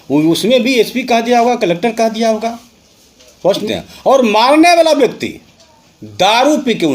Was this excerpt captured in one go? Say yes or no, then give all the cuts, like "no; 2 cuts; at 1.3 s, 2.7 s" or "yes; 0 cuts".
no; 1 cut; at 3.6 s